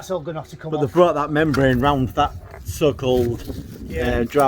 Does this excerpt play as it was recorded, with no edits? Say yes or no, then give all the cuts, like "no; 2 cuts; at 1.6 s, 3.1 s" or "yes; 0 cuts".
yes; 0 cuts